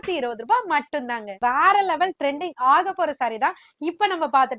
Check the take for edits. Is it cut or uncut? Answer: cut